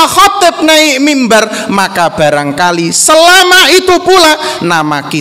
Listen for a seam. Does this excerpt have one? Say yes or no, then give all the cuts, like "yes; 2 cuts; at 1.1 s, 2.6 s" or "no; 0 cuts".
no; 0 cuts